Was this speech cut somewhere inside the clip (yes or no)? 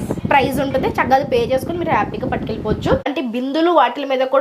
yes